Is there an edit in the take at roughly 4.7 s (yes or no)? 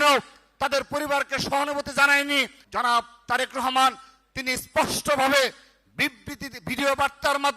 no